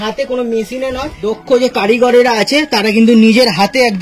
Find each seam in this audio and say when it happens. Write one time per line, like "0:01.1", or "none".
0:01.1